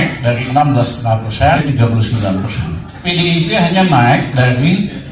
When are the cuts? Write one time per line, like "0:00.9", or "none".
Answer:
0:01.6
0:03.0